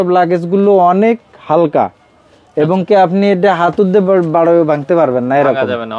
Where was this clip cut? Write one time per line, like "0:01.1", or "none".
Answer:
none